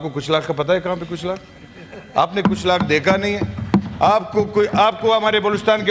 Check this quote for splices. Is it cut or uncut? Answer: uncut